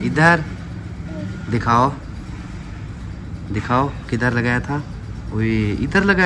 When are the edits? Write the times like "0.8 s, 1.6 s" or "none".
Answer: none